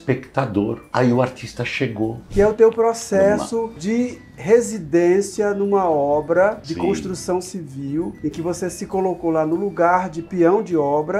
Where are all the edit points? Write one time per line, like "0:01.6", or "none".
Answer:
0:02.2